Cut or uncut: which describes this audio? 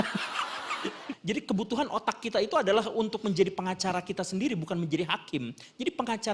cut